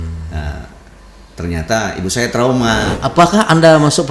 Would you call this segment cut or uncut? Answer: cut